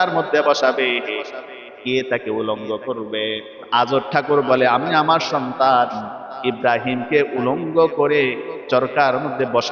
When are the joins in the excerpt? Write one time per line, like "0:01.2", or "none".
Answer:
0:03.7